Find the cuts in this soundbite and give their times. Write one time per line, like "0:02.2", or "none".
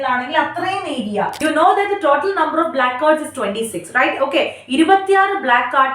0:01.3